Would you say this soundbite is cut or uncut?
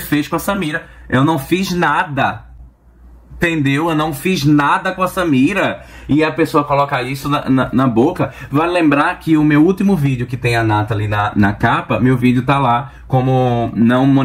uncut